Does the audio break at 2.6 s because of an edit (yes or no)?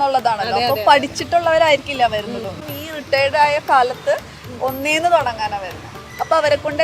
yes